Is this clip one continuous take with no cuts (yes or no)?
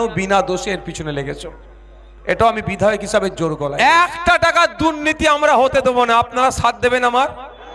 no